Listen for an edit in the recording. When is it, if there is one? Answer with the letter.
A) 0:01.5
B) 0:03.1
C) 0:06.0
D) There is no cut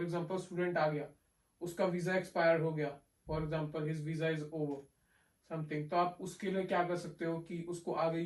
D